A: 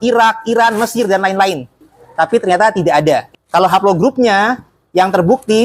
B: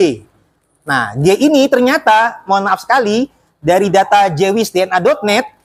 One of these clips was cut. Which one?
A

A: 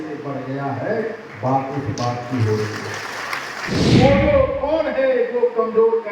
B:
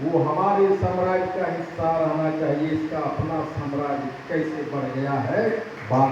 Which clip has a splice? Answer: A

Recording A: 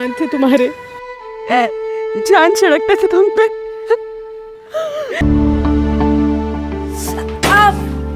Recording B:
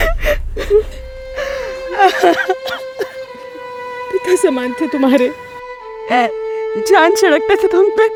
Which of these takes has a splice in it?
A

